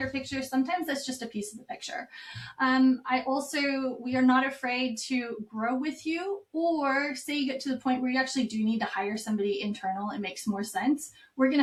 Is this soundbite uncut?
yes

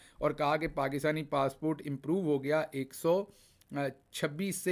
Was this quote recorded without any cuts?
yes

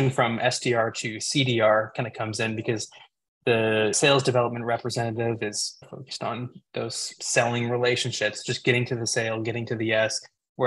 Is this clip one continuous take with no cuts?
no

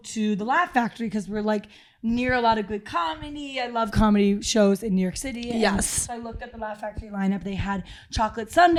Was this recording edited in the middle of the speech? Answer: no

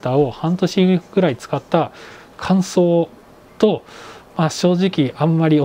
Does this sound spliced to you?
no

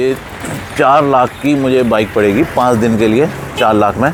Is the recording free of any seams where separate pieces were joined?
yes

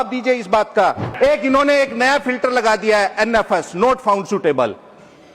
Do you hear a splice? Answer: yes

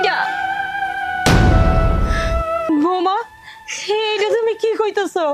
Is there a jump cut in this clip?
yes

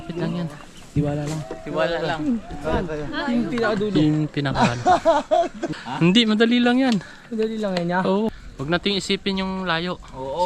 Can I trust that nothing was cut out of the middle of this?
no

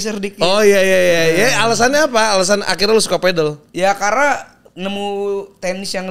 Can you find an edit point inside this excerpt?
no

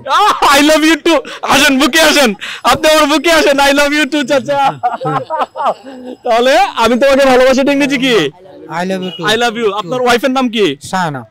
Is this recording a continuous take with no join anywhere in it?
yes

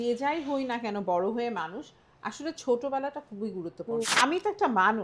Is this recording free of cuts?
no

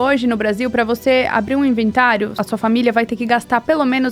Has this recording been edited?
yes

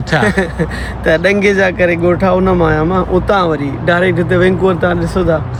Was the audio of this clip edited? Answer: no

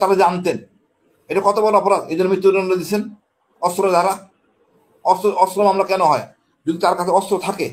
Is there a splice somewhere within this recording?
no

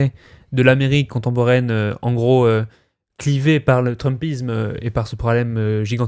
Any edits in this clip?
no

